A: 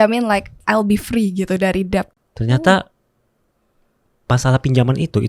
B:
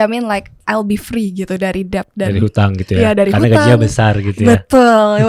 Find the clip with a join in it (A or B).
A